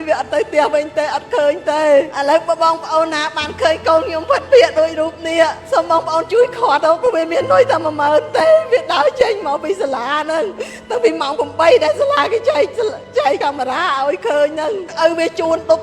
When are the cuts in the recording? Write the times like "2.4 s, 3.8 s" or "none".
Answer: 14.9 s

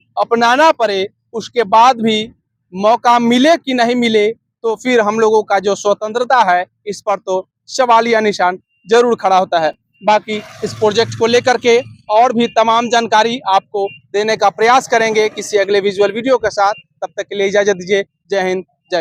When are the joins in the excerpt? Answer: none

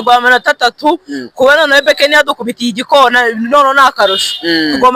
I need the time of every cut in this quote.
none

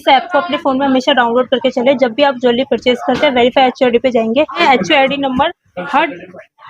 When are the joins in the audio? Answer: 4.6 s

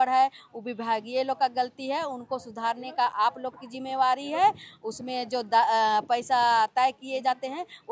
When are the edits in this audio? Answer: none

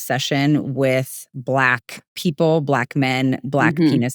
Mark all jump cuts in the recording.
none

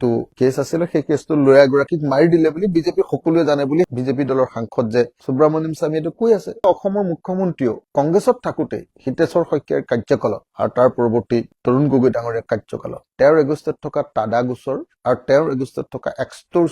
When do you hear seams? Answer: 3.9 s, 6.6 s

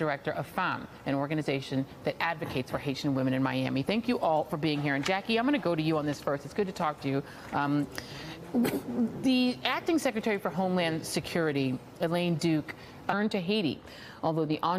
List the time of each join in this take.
none

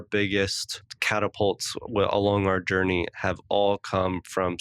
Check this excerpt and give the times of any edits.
0.9 s

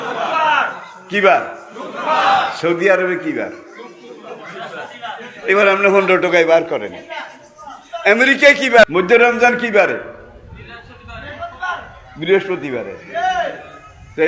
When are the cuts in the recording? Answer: 8.8 s

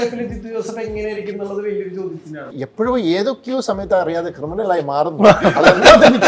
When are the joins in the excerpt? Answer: 2.5 s

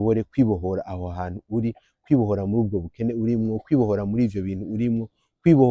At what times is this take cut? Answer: none

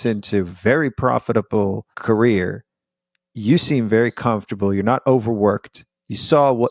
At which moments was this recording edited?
none

